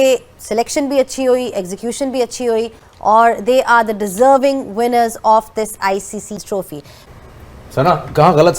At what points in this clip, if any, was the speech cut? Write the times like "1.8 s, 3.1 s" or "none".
7.0 s